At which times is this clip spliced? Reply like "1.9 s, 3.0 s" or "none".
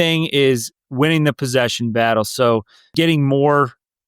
2.8 s